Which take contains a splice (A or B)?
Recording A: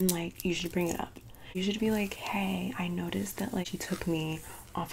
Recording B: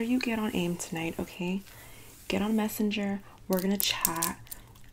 A